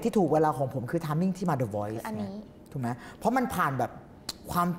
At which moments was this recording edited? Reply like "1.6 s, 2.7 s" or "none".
none